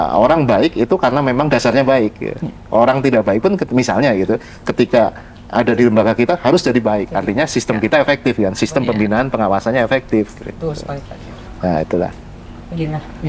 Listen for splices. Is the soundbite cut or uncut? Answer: uncut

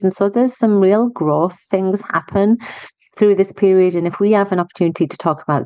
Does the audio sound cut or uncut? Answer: uncut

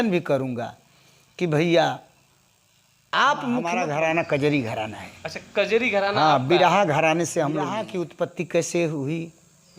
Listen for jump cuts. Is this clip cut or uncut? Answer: cut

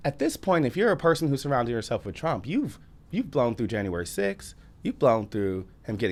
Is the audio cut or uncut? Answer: uncut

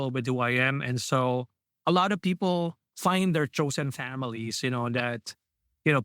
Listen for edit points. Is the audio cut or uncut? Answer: cut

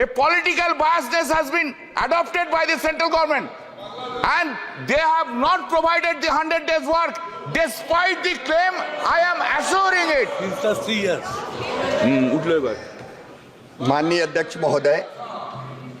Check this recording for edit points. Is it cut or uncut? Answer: uncut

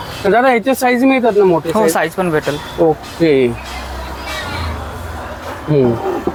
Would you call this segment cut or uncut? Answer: uncut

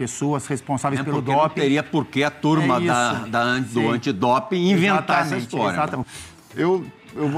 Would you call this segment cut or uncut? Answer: cut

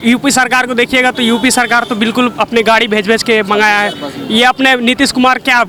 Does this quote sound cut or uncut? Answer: uncut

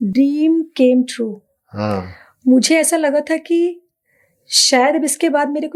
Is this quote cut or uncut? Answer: uncut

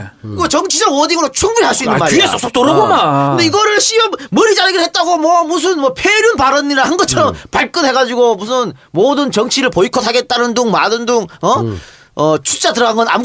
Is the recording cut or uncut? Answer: cut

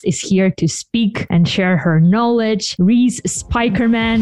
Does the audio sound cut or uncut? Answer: uncut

